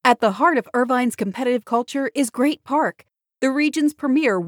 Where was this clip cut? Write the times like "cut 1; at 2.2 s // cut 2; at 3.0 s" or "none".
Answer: none